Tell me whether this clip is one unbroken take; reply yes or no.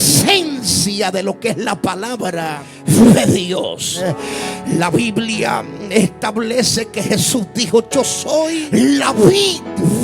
no